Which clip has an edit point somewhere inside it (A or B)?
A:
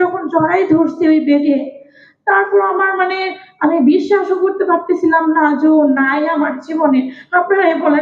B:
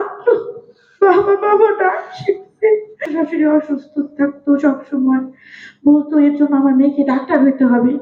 B